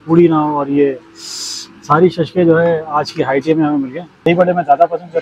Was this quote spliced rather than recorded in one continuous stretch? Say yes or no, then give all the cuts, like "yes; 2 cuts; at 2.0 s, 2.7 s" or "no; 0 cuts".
yes; 1 cut; at 4.3 s